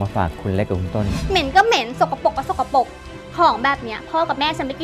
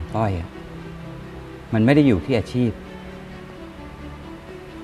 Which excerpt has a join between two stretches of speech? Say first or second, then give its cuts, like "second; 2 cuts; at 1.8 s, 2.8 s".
first; 1 cut; at 1.2 s